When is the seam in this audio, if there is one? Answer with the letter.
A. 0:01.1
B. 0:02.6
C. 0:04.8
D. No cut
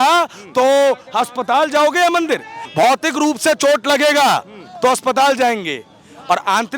B